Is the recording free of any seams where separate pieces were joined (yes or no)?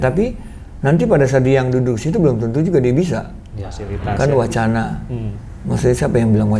no